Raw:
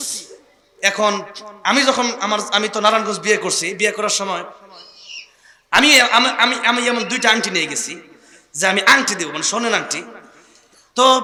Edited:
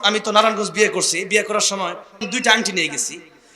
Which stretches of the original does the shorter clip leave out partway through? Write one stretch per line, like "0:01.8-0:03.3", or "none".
0:04.7-0:07.0